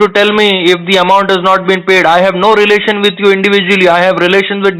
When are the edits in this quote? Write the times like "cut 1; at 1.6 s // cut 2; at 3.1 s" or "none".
none